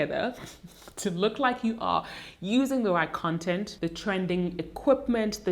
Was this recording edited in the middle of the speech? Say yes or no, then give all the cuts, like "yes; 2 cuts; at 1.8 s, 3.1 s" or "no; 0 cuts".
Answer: yes; 1 cut; at 3.7 s